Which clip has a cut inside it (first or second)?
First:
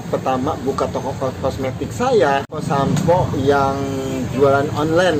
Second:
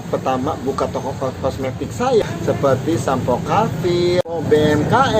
second